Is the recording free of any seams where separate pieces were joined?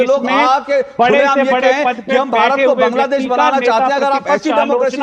yes; 0 cuts

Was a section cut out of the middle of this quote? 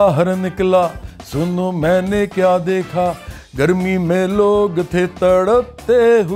no; 0 cuts

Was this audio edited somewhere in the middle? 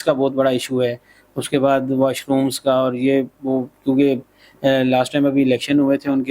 no; 0 cuts

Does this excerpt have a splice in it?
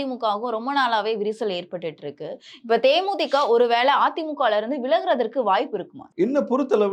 no; 0 cuts

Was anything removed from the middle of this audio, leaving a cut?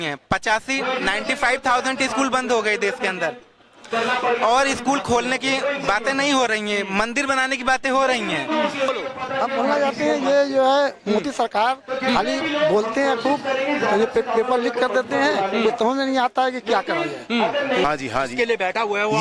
yes; 2 cuts; at 8.9 s, 17.8 s

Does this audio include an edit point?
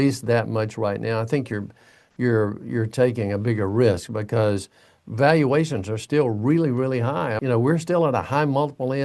yes; 1 cut; at 7.4 s

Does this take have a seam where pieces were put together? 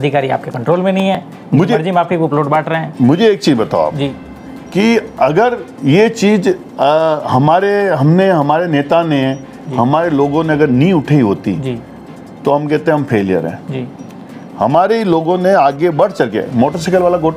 no; 0 cuts

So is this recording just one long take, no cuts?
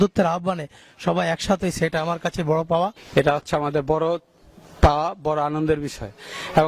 no; 1 cut; at 3.0 s

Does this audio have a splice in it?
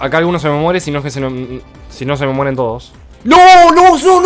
yes; 1 cut; at 3.1 s

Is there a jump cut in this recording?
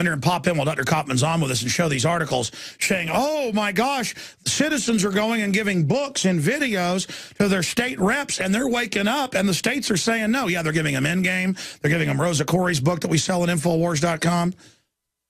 yes; 1 cut; at 10.6 s

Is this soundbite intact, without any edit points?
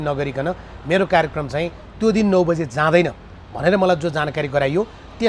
yes; 0 cuts

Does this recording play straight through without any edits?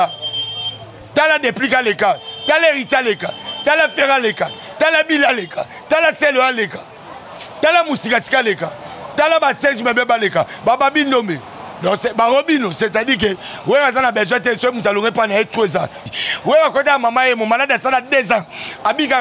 no; 1 cut; at 16.0 s

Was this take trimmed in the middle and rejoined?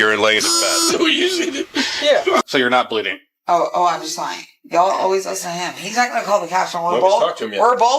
yes; 1 cut; at 2.4 s

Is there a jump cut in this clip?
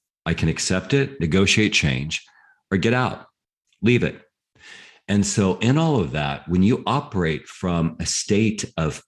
yes; 1 cut; at 1.1 s

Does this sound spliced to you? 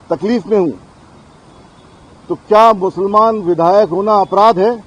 no; 0 cuts

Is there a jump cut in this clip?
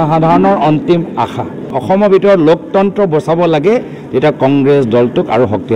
yes; 1 cut; at 1.7 s

